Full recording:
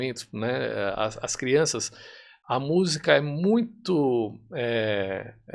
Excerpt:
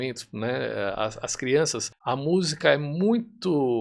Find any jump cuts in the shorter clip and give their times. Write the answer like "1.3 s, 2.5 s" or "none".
1.9 s